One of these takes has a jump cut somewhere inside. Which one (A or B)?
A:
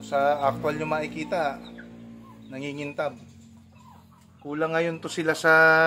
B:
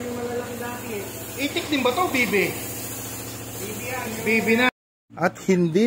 B